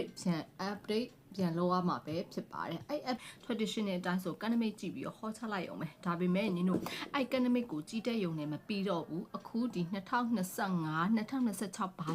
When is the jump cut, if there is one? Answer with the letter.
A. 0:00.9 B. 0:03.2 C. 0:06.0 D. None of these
B